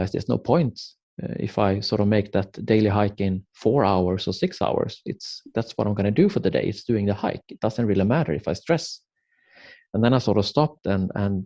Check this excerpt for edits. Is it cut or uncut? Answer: uncut